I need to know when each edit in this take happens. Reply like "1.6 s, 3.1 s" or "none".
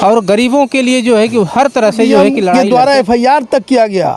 2.5 s